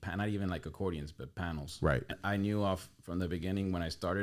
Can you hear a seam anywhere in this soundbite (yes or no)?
yes